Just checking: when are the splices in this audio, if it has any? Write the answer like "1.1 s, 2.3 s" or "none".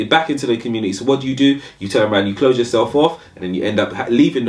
none